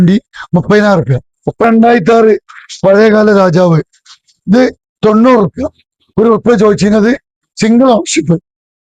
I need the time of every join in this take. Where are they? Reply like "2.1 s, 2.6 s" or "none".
1.6 s